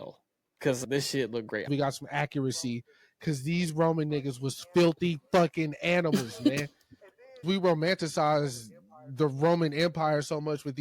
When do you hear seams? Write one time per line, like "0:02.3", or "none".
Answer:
0:01.7
0:07.4